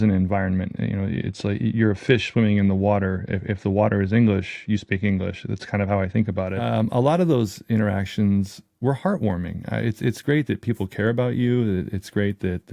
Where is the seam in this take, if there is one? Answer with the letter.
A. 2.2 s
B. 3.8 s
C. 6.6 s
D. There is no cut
C